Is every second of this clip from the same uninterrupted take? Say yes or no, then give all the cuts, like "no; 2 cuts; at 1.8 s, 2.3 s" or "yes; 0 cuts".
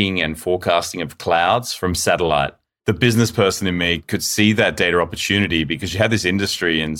no; 3 cuts; at 1.7 s, 2.7 s, 4.0 s